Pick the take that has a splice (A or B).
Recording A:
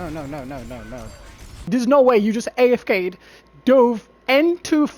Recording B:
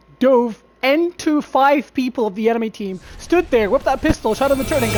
A